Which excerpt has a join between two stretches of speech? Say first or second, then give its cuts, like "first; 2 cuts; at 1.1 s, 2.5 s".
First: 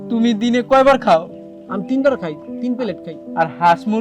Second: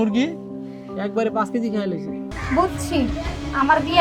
second; 1 cut; at 2.3 s